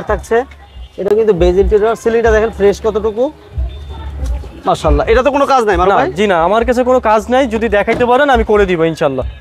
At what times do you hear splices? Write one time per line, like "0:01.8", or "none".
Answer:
none